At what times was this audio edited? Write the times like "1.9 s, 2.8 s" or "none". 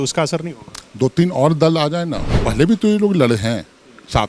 2.3 s

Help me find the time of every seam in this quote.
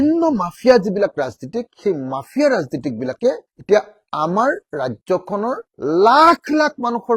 none

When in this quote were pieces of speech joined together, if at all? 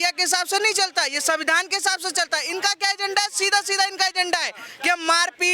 none

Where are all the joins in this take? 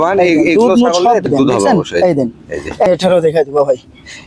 1.2 s, 2.9 s

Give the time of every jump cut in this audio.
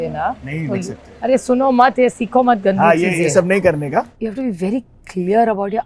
4.2 s

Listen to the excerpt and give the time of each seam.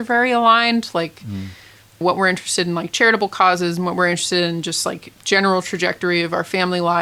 none

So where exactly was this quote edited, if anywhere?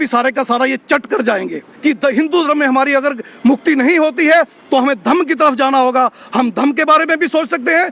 1.7 s

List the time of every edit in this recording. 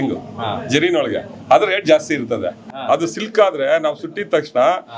2.6 s

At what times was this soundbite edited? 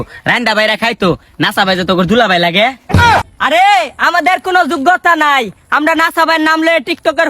2.9 s

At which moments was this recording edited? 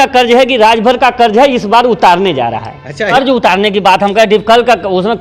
3.1 s

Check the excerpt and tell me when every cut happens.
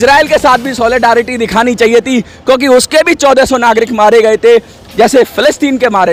none

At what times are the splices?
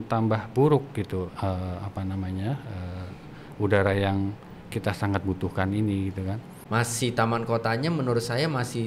6.6 s

